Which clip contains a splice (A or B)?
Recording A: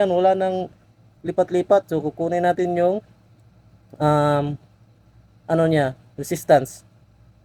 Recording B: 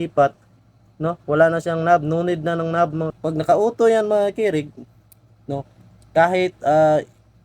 B